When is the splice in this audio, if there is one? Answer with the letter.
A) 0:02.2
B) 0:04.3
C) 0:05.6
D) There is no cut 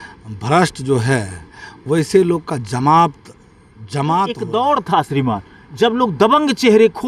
B